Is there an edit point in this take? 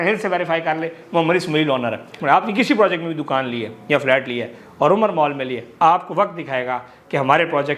yes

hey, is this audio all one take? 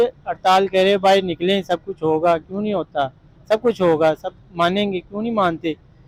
yes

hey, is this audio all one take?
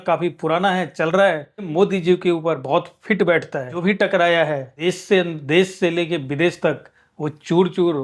no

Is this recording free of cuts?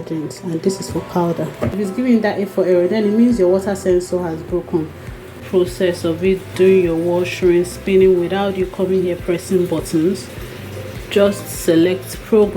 no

